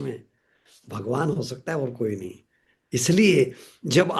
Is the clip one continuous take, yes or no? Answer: yes